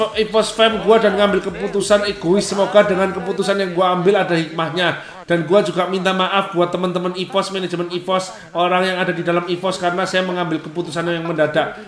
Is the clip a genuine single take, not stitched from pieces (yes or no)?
yes